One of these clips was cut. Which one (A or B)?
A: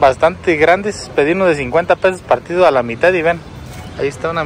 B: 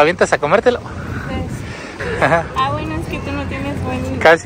B